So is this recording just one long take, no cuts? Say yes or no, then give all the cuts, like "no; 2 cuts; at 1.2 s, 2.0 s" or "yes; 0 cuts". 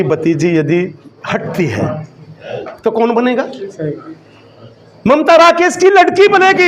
yes; 0 cuts